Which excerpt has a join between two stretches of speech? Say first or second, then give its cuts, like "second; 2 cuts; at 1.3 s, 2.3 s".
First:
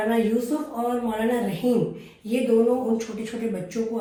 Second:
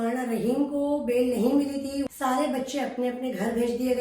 second; 1 cut; at 2.1 s